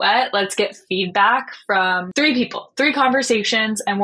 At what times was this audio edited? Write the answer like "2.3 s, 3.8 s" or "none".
2.0 s

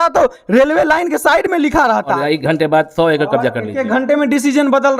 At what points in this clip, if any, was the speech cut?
2.1 s

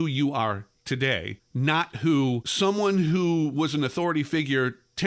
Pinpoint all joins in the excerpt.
1.4 s, 2.5 s

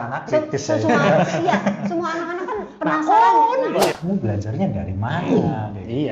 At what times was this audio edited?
4.3 s

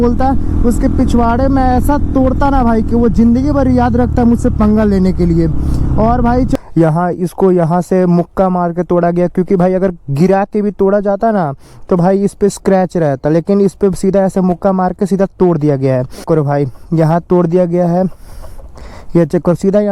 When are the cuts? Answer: 6.5 s, 16.2 s

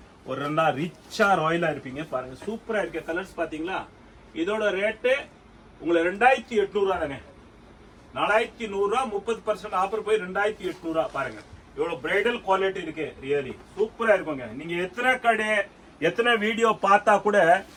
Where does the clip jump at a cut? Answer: none

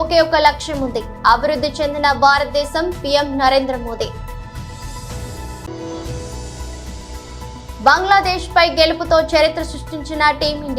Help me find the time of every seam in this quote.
none

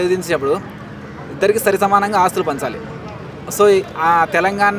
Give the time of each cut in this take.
none

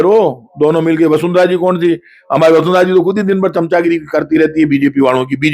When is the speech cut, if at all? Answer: none

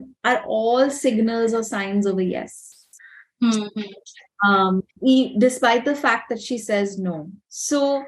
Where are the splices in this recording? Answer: none

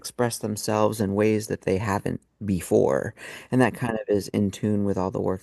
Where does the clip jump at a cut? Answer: none

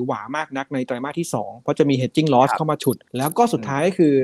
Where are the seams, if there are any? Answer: 3.1 s

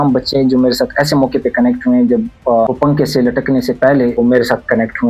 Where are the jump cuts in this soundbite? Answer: 2.7 s, 4.1 s

